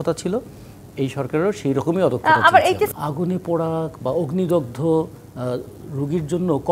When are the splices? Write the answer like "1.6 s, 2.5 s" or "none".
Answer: 2.9 s